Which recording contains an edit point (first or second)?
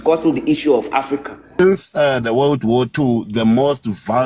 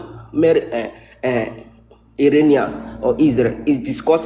first